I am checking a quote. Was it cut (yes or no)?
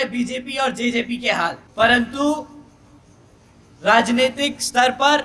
yes